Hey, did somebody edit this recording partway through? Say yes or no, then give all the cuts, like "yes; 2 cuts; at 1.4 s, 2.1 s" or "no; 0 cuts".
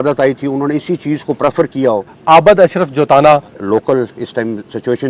yes; 2 cuts; at 2.1 s, 3.6 s